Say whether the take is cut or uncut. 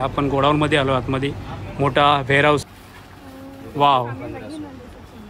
cut